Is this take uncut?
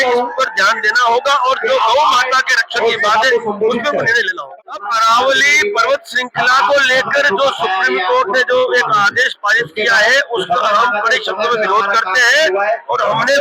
no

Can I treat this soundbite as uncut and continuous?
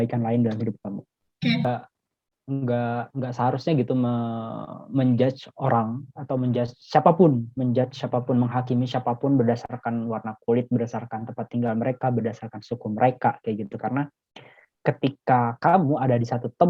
no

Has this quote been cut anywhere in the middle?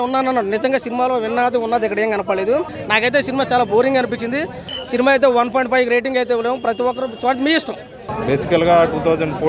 yes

